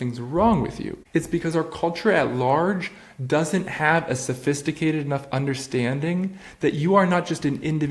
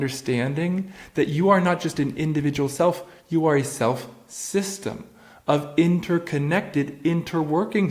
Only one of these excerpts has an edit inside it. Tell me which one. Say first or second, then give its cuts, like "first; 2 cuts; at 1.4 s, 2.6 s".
first; 1 cut; at 0.9 s